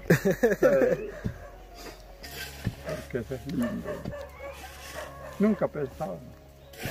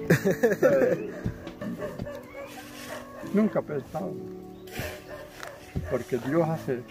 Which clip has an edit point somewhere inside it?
second; 1 cut; at 1.6 s

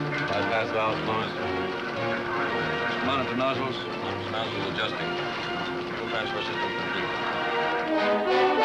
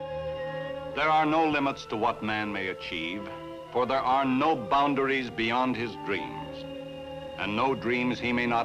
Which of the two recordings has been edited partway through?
second; 1 cut; at 2.0 s

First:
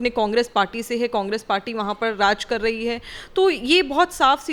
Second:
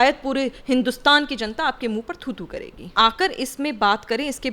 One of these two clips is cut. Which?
second; 1 cut; at 2.9 s

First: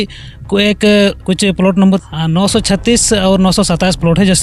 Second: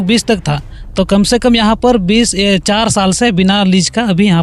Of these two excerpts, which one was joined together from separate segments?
first; 1 cut; at 1.8 s

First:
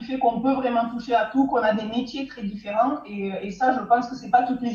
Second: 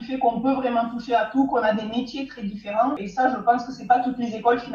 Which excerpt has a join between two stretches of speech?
second; 1 cut; at 3.0 s

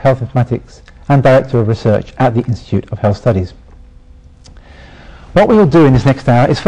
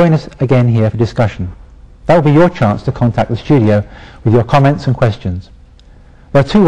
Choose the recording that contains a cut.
first; 1 cut; at 4.8 s

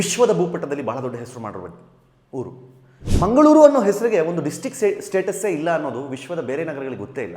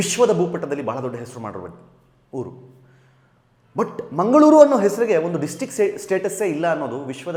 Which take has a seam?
first; 1 cut; at 3.1 s

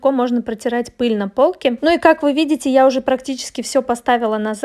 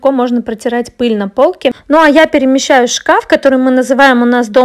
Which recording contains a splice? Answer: second; 1 cut; at 1.8 s

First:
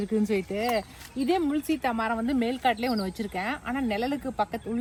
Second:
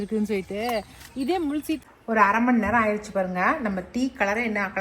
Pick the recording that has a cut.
second; 1 cut; at 1.8 s

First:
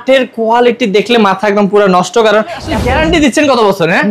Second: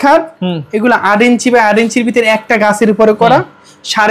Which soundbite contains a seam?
first; 1 cut; at 2.7 s

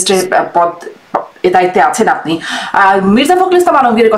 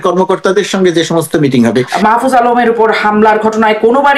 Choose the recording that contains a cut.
second; 1 cut; at 1.9 s

